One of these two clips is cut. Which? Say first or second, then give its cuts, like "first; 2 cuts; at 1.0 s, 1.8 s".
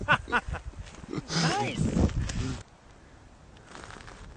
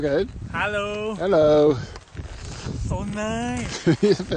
first; 1 cut; at 2.6 s